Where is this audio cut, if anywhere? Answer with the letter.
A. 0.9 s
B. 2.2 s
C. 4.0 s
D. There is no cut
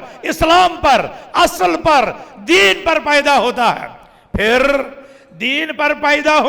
D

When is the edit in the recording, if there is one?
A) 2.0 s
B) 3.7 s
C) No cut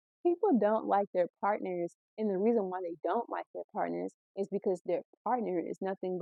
C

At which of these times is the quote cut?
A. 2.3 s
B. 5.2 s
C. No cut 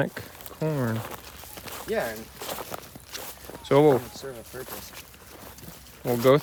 C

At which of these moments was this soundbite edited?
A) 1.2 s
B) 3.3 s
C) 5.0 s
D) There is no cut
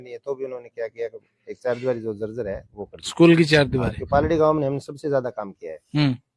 D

